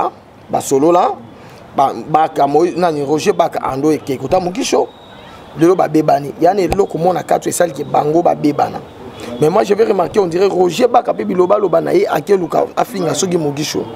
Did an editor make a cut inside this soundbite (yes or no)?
no